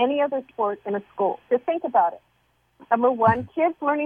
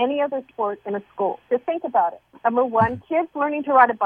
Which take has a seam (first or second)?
second